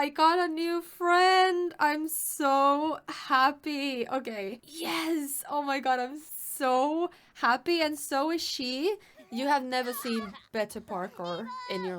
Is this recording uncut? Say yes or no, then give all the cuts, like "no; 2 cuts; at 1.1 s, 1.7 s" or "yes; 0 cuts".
no; 2 cuts; at 4.6 s, 9.2 s